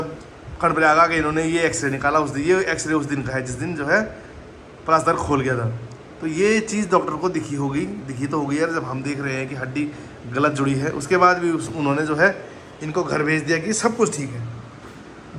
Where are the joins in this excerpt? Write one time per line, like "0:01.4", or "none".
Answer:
none